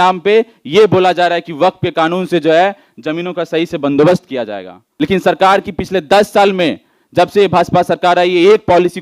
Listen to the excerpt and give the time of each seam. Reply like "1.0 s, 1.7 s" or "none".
4.8 s